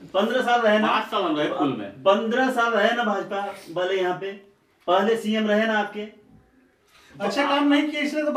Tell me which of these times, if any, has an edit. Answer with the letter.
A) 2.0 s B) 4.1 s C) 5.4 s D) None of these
D